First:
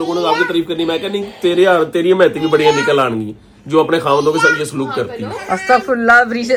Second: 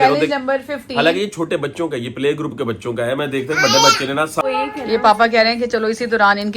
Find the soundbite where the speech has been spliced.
second; 1 cut; at 4.4 s

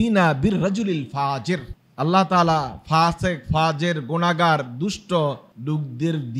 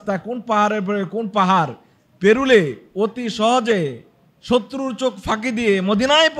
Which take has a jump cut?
first; 2 cuts; at 1.8 s, 5.5 s

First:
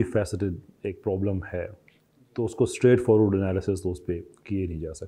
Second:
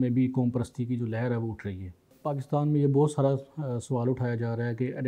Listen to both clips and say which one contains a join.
second; 1 cut; at 2.1 s

